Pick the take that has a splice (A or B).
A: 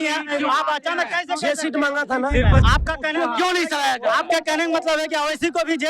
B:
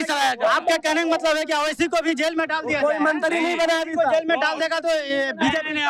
A